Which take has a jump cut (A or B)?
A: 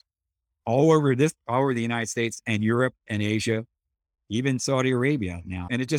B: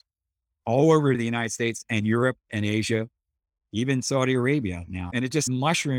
B